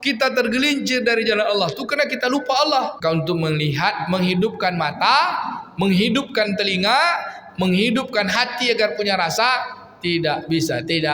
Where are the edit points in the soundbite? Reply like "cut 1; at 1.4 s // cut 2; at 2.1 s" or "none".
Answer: cut 1; at 3.0 s